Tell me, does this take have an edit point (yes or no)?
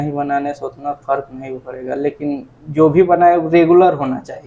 no